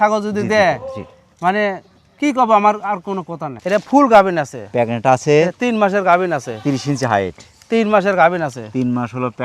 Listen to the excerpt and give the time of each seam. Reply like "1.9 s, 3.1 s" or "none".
3.6 s